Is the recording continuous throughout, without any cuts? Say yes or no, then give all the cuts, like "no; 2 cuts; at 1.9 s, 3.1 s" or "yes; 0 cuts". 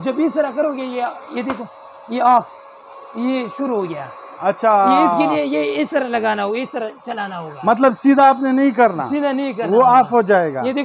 yes; 0 cuts